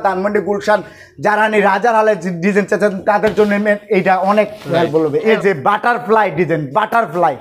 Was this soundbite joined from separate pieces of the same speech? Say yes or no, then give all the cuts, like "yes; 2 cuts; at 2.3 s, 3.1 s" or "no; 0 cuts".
yes; 1 cut; at 5.4 s